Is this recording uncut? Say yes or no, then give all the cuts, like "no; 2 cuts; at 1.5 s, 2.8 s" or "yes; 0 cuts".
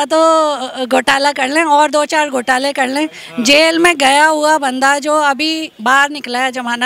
yes; 0 cuts